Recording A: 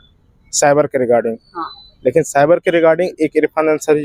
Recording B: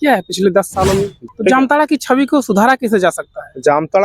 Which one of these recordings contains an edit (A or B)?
B